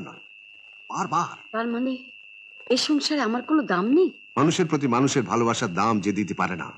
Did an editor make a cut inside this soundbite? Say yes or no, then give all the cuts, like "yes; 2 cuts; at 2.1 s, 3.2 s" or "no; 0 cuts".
no; 0 cuts